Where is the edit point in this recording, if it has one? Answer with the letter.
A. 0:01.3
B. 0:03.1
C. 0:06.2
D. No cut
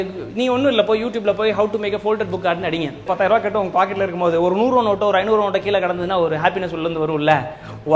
B